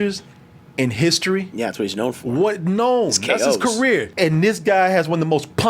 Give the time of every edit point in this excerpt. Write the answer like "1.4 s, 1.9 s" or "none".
4.1 s